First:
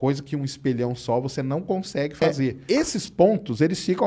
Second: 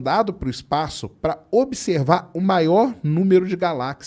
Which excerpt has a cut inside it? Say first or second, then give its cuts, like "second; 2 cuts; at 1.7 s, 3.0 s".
first; 1 cut; at 2.5 s